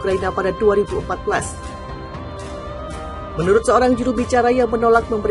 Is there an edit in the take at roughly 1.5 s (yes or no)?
yes